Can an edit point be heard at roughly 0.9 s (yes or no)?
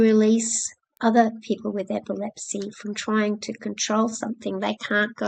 yes